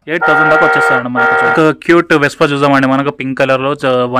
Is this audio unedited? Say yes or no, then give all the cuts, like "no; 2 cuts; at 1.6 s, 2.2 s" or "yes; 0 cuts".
no; 1 cut; at 1.5 s